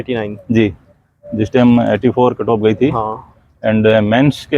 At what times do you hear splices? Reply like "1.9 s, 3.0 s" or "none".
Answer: none